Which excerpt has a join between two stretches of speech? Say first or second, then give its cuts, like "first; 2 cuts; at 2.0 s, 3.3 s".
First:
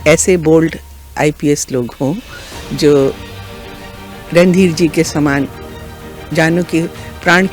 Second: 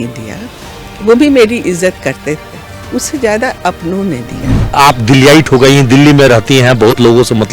second; 1 cut; at 4.7 s